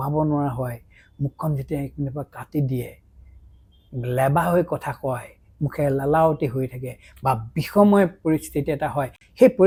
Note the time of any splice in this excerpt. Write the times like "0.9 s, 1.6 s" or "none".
none